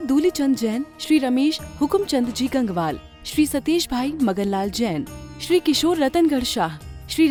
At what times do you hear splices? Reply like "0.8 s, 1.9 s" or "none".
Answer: none